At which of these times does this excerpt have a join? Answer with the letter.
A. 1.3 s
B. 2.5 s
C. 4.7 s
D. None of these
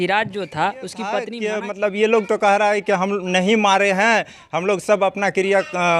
A